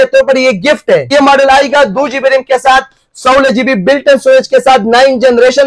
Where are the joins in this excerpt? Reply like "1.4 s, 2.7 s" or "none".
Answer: 1.1 s